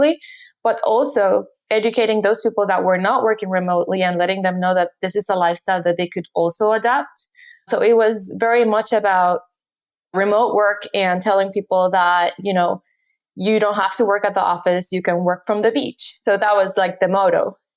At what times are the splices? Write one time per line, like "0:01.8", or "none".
0:01.6